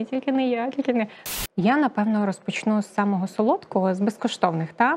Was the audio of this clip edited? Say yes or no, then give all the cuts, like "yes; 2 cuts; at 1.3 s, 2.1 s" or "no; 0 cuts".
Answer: yes; 1 cut; at 1.2 s